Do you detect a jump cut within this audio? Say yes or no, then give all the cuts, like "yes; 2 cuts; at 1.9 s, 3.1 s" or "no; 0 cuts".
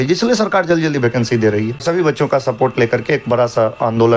yes; 1 cut; at 1.8 s